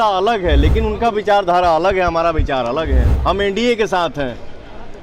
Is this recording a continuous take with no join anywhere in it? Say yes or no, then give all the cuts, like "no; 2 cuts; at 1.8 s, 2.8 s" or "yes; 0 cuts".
no; 1 cut; at 3.1 s